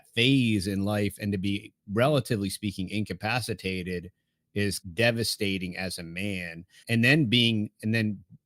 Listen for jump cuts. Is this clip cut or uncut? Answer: cut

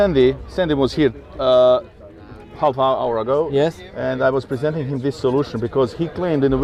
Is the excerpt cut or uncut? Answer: uncut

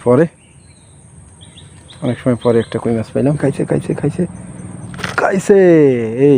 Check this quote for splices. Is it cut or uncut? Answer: cut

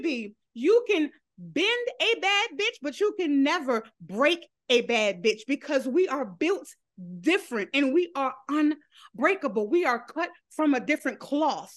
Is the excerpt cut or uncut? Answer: uncut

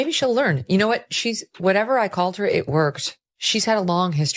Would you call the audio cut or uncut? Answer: uncut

